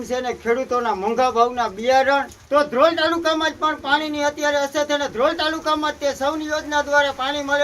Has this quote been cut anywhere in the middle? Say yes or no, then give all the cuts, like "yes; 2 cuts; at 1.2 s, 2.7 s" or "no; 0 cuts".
yes; 1 cut; at 2.4 s